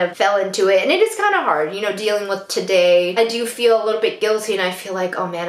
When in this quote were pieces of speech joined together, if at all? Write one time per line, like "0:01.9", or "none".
none